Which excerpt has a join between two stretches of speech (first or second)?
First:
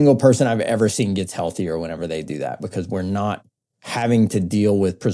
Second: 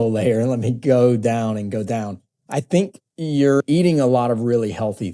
second